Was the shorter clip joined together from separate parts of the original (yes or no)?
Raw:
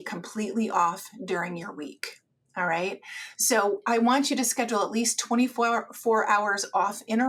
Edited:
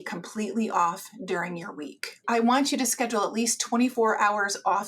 yes